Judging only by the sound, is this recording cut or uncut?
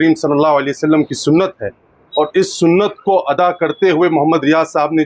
uncut